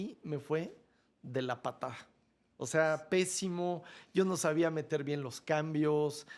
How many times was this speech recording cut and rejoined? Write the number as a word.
zero